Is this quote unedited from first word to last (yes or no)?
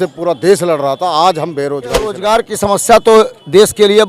no